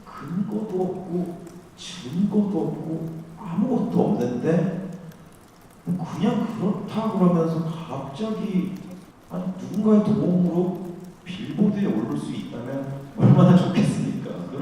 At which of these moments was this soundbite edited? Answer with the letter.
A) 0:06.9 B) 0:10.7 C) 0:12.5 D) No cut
A